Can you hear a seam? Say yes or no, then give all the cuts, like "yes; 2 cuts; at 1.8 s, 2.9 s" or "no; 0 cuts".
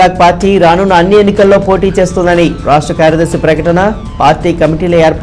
no; 0 cuts